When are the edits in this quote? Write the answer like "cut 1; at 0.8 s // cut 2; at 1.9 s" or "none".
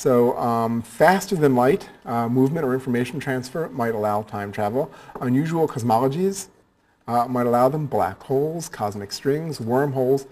cut 1; at 5.1 s